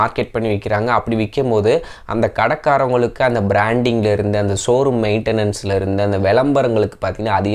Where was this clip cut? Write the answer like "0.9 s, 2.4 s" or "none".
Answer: none

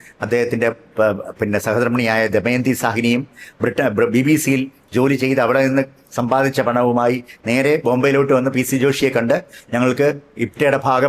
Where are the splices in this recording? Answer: none

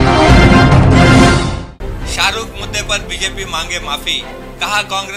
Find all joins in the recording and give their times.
1.5 s

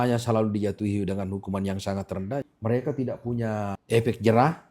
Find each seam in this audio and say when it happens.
2.4 s, 3.8 s

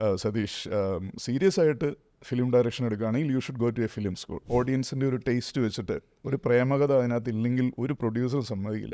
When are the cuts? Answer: 4.3 s

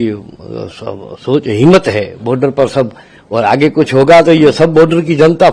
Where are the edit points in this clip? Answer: none

